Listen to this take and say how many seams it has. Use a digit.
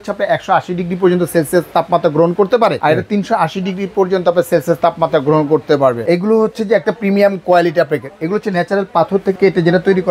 3